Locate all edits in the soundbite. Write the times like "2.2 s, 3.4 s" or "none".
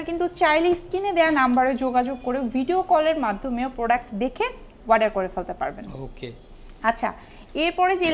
none